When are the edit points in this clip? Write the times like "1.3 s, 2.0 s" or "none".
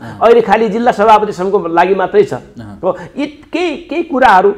none